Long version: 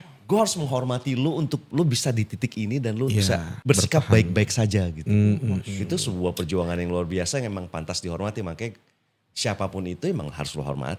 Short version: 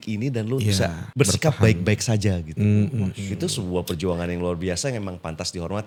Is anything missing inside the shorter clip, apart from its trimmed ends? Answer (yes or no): no